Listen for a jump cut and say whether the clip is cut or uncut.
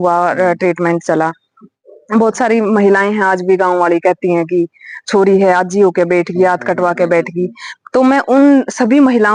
uncut